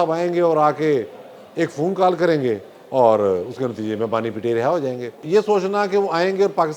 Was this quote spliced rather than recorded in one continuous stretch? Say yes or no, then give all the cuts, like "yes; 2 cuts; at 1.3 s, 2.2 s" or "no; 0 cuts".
yes; 1 cut; at 5.2 s